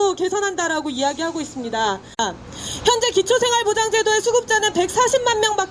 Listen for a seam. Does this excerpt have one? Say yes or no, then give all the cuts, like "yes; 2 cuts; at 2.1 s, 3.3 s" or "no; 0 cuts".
no; 0 cuts